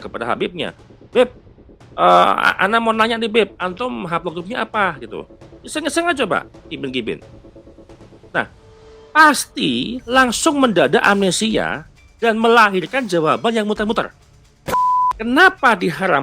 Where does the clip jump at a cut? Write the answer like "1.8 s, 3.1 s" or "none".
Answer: 14.7 s